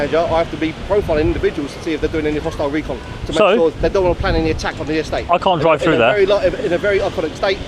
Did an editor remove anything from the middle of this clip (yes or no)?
no